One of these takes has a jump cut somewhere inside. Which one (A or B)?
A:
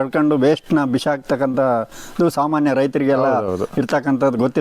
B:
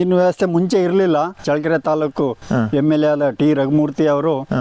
B